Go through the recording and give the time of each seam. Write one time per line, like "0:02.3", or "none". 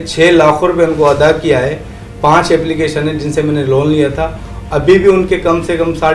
none